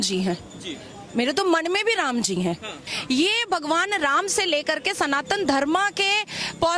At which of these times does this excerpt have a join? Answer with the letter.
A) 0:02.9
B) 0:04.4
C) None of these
A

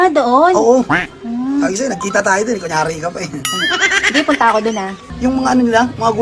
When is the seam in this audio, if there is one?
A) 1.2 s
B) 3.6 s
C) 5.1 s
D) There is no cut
C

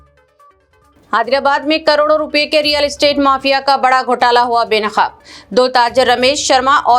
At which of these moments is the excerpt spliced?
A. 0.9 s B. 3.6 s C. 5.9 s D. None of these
A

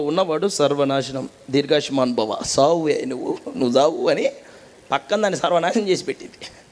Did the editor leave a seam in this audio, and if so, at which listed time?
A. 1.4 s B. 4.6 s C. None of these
C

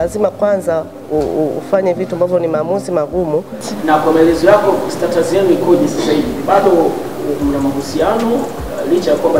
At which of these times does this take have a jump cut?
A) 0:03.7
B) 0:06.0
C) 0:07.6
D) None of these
A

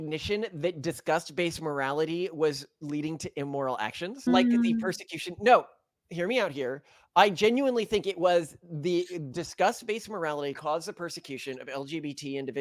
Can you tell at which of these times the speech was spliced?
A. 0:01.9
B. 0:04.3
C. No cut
B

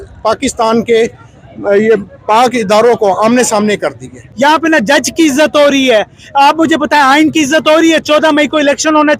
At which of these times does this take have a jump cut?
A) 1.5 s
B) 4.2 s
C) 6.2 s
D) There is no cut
B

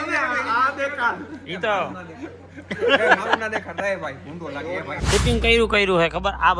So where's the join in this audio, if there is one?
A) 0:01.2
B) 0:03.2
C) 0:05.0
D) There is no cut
C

